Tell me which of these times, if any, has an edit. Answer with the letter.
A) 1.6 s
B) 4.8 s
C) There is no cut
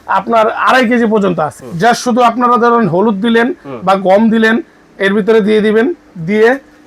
A